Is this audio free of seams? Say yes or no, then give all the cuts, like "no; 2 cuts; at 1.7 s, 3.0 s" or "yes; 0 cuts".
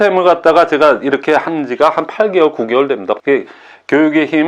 no; 1 cut; at 3.2 s